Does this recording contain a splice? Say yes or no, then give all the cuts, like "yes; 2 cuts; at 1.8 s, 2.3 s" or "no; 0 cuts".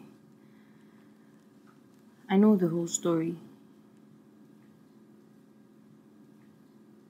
no; 0 cuts